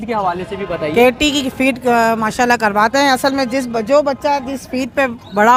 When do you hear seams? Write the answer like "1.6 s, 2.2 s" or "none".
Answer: none